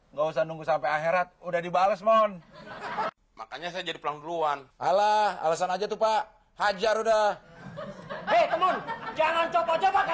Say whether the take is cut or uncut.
cut